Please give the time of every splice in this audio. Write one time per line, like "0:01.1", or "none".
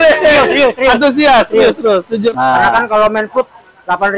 0:02.3